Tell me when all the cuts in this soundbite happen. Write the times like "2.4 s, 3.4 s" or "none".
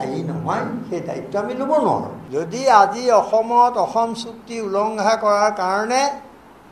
2.2 s